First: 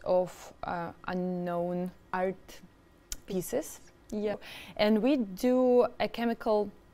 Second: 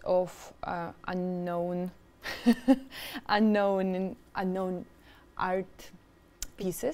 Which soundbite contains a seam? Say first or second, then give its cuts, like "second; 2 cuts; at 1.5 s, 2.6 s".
first; 2 cuts; at 2.0 s, 4.4 s